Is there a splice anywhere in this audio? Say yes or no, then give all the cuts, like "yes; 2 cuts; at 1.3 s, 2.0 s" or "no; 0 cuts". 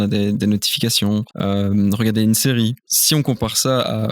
yes; 2 cuts; at 1.3 s, 2.9 s